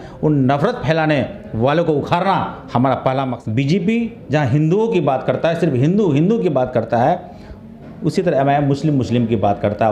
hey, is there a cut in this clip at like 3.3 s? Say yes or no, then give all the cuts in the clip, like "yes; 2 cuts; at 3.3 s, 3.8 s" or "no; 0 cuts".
yes; 1 cut; at 3.3 s